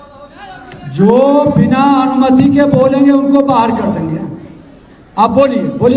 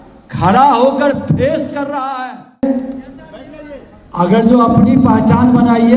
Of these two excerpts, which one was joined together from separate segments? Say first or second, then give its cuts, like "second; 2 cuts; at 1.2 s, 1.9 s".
second; 1 cut; at 2.4 s